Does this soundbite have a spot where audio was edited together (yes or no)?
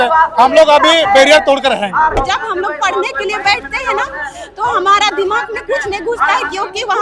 yes